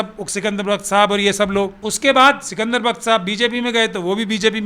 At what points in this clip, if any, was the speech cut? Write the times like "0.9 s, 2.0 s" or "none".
1.8 s